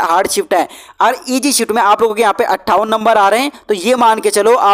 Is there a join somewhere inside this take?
no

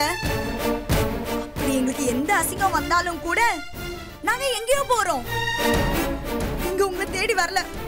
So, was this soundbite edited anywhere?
no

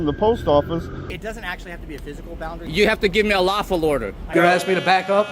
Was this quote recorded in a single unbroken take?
no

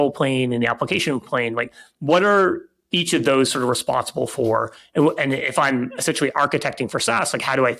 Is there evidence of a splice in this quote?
no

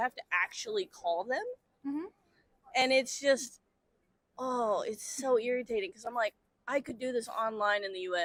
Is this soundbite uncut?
yes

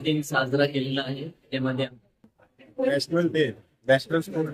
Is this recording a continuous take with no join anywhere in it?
no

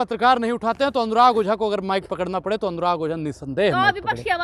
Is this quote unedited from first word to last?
yes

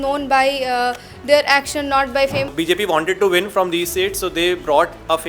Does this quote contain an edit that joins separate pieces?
yes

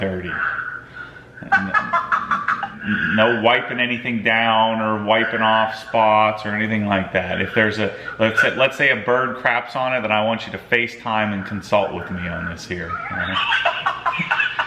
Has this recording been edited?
yes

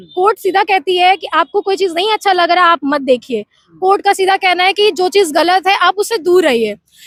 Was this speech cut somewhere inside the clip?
no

